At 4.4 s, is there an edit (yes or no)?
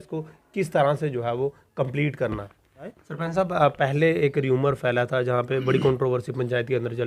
no